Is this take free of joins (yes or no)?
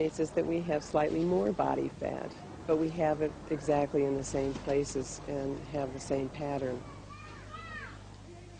yes